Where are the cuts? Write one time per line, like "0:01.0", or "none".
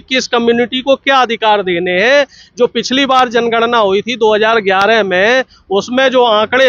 none